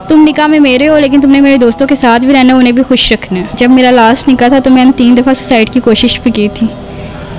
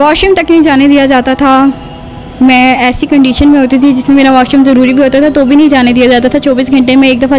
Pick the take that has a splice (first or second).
first